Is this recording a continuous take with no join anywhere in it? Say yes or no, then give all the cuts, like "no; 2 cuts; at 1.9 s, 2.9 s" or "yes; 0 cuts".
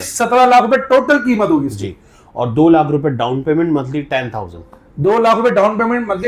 yes; 0 cuts